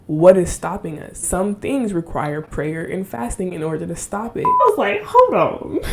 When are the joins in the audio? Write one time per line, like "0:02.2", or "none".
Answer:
0:01.2
0:04.6